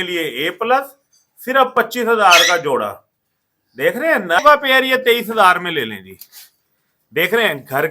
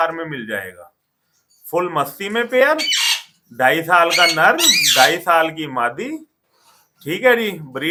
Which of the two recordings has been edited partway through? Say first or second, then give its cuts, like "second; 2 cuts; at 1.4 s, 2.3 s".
first; 1 cut; at 4.4 s